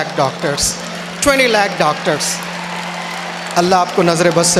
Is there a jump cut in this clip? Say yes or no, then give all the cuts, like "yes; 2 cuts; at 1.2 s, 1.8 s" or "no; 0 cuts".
no; 0 cuts